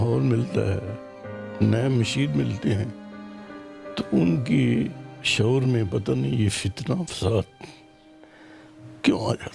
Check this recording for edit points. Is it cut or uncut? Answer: uncut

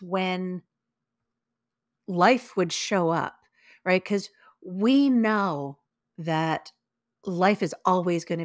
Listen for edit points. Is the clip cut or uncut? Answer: uncut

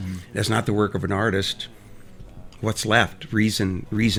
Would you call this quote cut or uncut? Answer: uncut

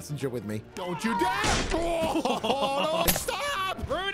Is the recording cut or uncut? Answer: cut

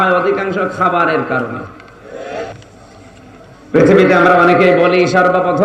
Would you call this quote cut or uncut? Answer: cut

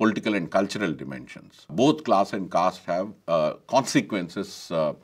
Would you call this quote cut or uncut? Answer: cut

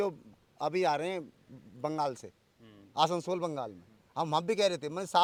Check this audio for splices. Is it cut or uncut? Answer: uncut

